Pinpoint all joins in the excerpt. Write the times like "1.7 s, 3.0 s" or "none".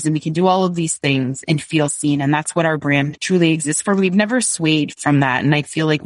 1.4 s, 3.2 s, 4.9 s